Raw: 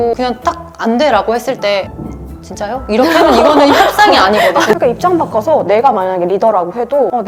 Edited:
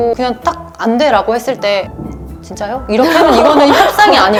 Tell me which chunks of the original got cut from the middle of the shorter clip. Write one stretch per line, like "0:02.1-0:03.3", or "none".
none